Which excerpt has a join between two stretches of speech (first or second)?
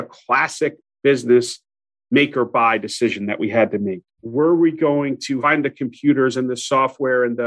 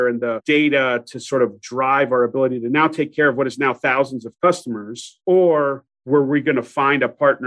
first